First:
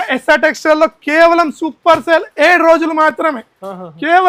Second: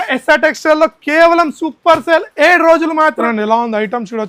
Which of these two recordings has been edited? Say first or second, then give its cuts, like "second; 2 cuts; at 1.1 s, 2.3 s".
second; 1 cut; at 3.2 s